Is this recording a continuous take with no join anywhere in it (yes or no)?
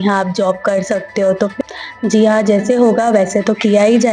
no